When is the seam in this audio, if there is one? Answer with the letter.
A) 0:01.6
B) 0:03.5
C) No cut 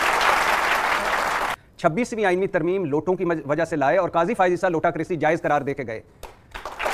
A